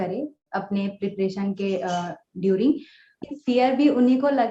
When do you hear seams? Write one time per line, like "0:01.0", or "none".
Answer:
0:03.2

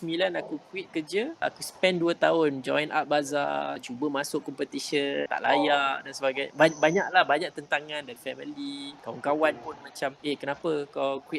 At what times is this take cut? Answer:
0:01.4
0:03.9
0:05.3
0:08.1
0:09.0
0:10.2

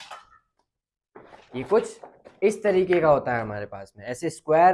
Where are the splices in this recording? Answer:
none

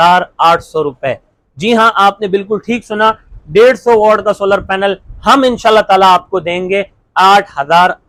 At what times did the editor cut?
none

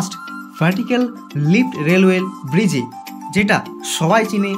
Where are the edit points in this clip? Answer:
none

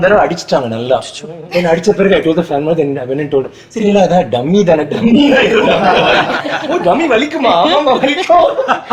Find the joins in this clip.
none

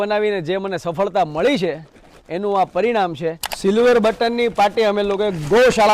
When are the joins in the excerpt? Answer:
0:03.5

